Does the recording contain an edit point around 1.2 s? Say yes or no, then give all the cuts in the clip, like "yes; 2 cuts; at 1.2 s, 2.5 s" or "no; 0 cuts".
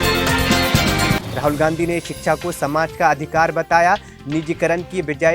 yes; 1 cut; at 1.2 s